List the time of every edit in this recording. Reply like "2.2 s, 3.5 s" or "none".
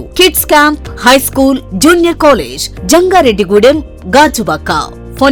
none